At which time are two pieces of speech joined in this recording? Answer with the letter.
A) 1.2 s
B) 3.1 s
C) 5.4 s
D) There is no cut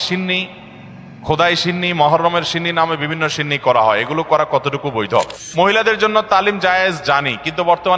C